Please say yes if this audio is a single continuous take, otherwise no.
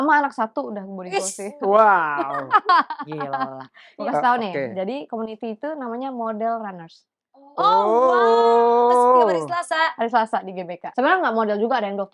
no